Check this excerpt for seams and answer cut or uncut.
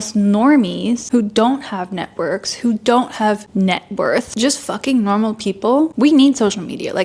cut